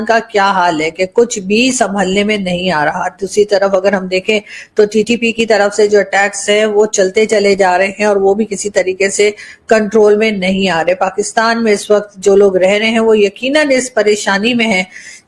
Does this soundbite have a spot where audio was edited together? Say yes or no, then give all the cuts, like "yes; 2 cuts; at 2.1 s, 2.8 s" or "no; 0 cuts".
no; 0 cuts